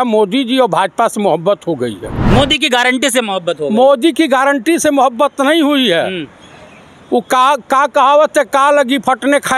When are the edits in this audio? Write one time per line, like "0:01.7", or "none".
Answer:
0:02.1

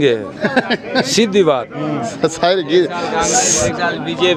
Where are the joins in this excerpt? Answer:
none

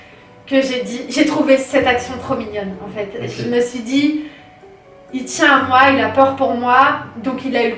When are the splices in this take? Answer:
none

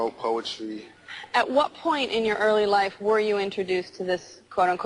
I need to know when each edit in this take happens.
0:02.2

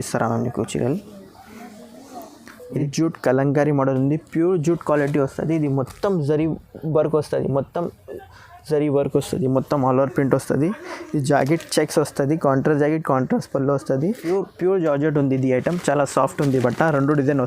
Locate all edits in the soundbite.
0:02.8
0:14.2

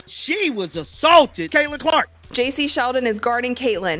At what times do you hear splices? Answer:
none

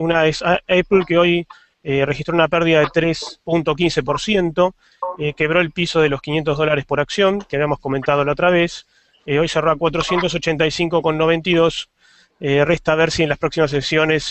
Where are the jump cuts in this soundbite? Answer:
0:03.6

